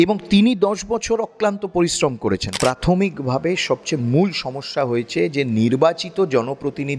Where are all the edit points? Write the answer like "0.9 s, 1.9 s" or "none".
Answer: 2.5 s